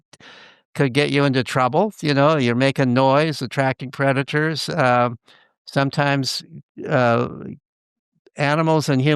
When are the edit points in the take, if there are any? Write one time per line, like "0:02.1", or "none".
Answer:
none